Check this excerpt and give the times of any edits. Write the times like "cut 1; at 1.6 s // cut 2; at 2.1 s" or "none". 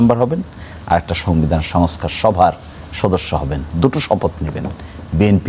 none